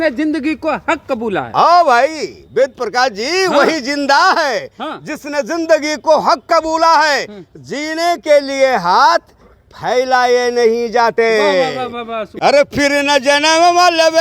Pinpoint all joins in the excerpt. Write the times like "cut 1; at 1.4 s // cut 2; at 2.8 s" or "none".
cut 1; at 12.2 s